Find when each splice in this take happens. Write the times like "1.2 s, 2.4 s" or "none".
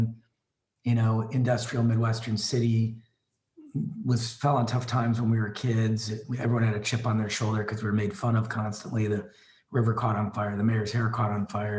none